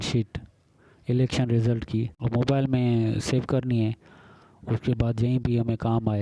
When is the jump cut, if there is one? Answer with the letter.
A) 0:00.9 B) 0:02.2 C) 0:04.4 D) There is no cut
B